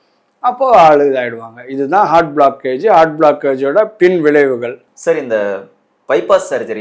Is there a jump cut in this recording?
no; 0 cuts

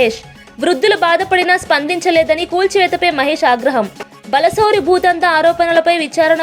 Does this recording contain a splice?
no; 0 cuts

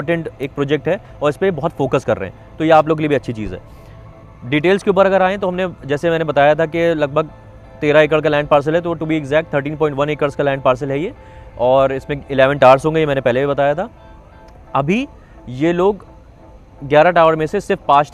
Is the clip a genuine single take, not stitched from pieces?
yes; 0 cuts

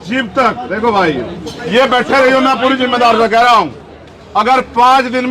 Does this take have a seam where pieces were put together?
yes; 1 cut; at 1.5 s

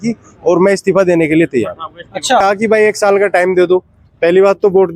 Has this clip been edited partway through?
yes; 1 cut; at 2.4 s

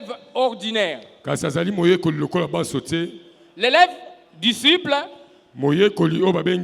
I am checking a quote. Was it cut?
no; 0 cuts

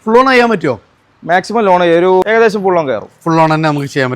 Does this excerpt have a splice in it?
yes; 1 cut; at 2.2 s

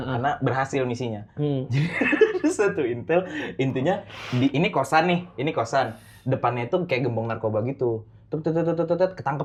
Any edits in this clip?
no; 0 cuts

